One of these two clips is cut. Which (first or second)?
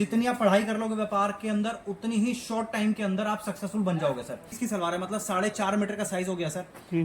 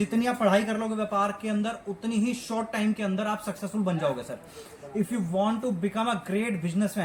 first